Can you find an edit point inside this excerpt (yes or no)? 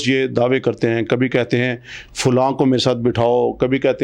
no